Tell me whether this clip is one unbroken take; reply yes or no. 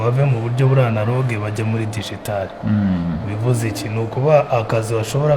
yes